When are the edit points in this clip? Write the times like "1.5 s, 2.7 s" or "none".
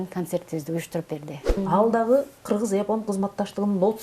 1.6 s